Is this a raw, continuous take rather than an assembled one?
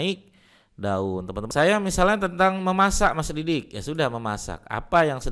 no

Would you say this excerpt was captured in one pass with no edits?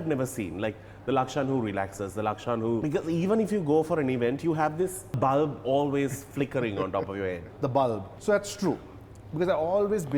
no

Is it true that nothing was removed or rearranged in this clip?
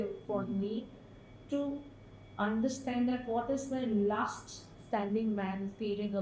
yes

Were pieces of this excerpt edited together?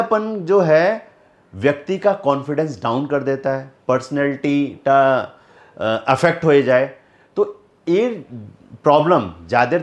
no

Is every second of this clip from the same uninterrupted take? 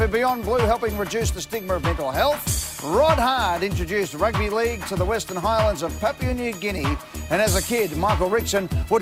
yes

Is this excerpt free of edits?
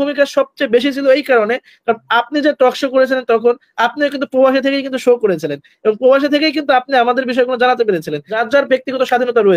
no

